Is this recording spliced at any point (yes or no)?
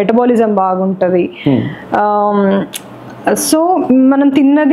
no